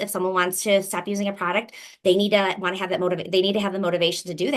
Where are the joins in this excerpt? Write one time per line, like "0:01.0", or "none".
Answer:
none